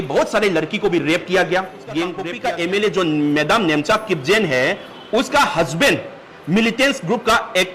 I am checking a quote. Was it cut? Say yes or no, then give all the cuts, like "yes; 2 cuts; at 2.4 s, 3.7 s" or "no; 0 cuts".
yes; 1 cut; at 2.3 s